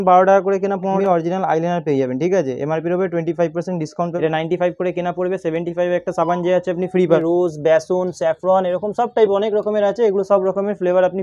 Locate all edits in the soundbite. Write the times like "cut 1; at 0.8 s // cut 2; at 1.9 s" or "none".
cut 1; at 1.0 s // cut 2; at 4.1 s // cut 3; at 7.2 s